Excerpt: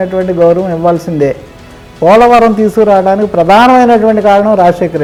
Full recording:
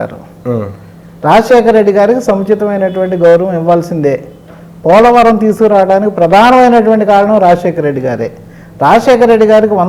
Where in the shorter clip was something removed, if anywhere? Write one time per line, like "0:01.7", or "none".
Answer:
none